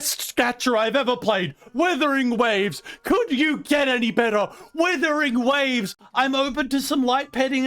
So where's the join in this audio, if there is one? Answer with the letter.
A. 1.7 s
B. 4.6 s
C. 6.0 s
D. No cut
C